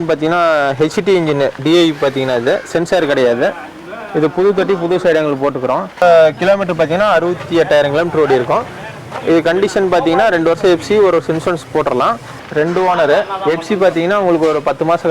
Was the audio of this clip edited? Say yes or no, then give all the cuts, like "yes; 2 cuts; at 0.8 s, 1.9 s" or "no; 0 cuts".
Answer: yes; 2 cuts; at 6.0 s, 12.4 s